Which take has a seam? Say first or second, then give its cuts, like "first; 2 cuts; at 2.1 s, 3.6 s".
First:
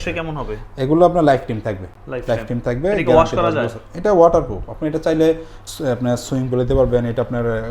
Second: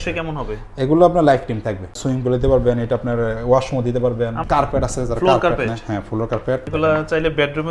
second; 3 cuts; at 2.0 s, 4.4 s, 6.6 s